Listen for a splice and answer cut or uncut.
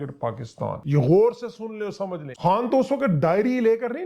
cut